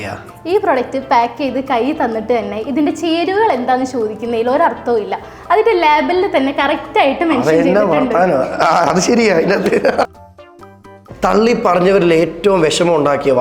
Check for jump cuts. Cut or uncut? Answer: cut